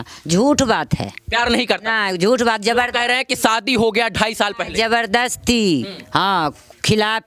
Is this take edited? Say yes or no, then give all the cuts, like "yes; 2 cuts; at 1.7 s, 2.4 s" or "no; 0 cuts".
no; 0 cuts